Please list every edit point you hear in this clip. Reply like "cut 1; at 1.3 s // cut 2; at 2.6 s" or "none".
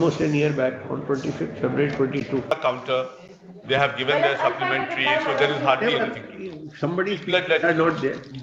cut 1; at 2.5 s